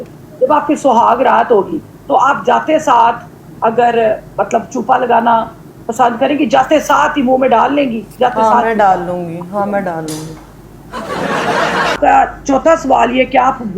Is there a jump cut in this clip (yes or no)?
yes